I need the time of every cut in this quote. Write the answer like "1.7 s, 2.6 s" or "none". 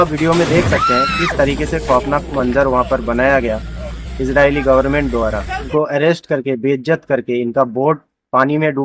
5.7 s